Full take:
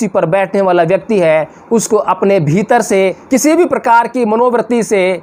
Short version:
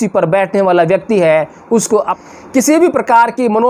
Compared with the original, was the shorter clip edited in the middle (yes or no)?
yes